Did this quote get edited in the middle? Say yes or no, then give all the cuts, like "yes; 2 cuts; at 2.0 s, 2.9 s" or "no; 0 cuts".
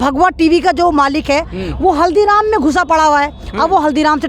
no; 0 cuts